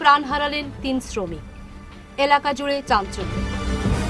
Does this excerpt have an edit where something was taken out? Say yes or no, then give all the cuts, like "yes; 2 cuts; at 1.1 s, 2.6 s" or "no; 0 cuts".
no; 0 cuts